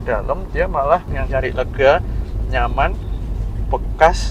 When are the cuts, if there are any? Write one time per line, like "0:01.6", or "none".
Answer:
0:01.2